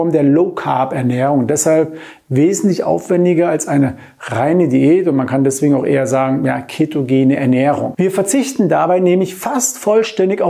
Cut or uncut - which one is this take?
uncut